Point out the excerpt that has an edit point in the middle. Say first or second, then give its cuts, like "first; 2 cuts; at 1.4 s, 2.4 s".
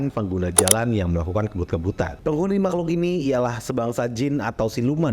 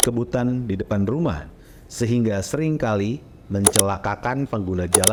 first; 1 cut; at 2.2 s